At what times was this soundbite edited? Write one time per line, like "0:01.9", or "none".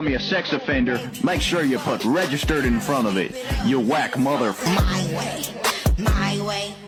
none